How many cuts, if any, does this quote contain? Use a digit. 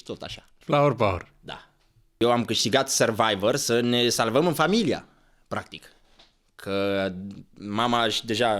1